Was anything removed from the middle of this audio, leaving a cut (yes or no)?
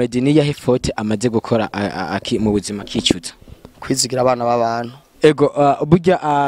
yes